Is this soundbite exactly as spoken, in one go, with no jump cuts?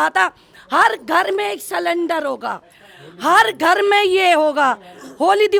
yes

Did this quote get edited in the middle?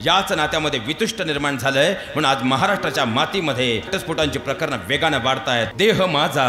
yes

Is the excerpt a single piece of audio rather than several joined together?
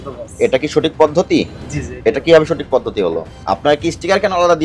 no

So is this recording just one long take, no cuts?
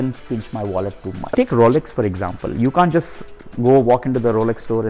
no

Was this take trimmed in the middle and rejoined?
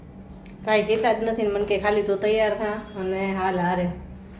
no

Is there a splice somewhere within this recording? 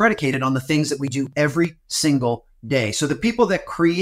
yes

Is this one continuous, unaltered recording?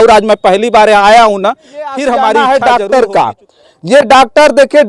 no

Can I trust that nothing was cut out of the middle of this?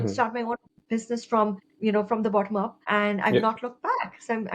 no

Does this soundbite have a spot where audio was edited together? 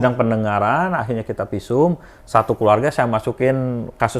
no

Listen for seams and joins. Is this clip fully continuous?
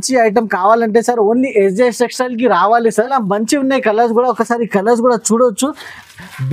no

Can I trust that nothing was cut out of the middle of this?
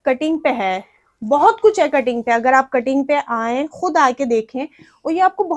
yes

